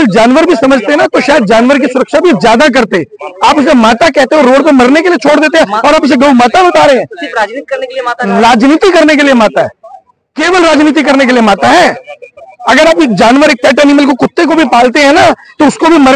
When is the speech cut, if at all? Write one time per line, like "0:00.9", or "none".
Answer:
none